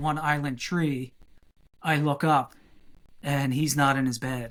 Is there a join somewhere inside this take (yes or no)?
no